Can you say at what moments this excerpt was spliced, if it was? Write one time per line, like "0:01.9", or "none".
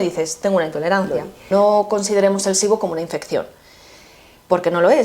0:01.4